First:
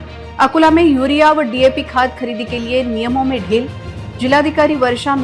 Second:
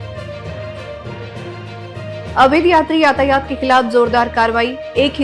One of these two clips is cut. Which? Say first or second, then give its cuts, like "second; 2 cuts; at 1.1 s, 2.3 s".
second; 2 cuts; at 1.6 s, 2.3 s